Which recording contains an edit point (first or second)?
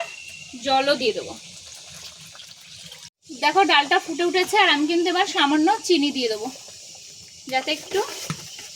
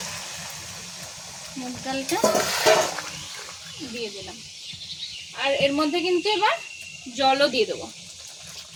first